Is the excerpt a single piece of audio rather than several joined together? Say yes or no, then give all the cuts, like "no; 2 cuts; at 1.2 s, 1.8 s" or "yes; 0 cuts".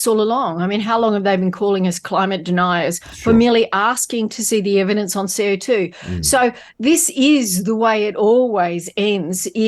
yes; 0 cuts